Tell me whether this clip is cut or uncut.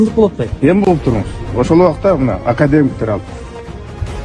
uncut